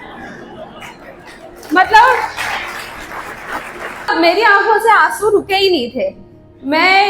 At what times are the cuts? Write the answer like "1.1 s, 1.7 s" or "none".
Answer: 4.1 s